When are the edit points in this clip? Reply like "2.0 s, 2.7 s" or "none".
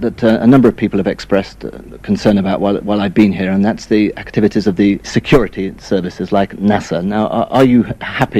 none